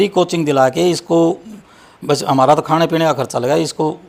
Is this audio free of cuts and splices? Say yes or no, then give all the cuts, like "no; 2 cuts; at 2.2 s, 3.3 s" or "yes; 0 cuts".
yes; 0 cuts